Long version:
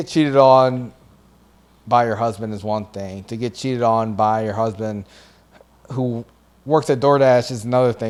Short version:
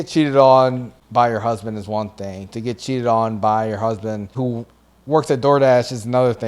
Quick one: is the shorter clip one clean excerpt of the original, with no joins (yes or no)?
no